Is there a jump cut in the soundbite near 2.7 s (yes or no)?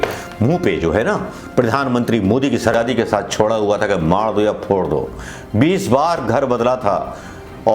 yes